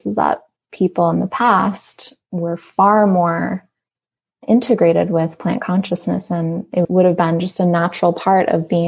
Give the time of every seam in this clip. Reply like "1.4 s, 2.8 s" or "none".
none